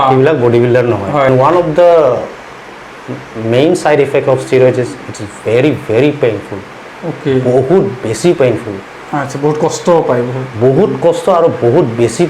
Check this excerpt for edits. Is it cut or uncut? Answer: cut